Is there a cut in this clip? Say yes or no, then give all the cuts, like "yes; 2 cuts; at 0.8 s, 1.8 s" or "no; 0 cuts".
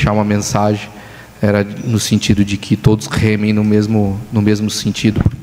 no; 0 cuts